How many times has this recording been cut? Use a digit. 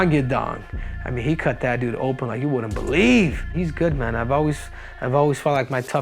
1